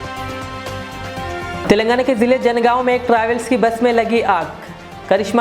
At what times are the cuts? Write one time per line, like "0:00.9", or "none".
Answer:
0:01.6